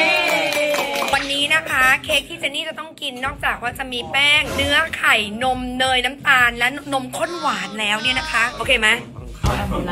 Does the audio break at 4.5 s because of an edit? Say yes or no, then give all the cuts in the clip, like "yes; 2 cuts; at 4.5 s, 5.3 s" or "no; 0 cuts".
yes; 2 cuts; at 4.5 s, 8.5 s